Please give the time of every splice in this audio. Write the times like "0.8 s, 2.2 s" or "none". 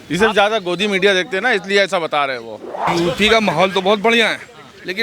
2.9 s